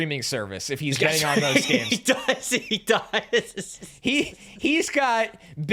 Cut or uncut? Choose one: uncut